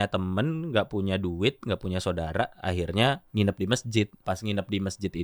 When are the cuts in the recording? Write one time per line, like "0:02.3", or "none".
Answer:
0:03.2
0:04.2